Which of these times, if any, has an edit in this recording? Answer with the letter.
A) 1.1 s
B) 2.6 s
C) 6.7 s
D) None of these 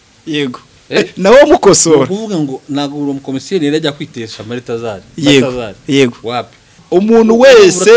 C